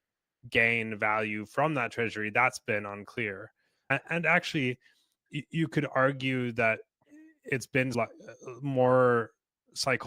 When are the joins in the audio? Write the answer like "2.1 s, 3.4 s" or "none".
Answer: 3.9 s, 7.9 s